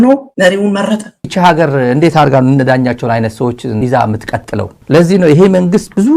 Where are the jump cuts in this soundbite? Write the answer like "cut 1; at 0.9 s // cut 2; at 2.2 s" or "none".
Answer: cut 1; at 1.2 s // cut 2; at 4.7 s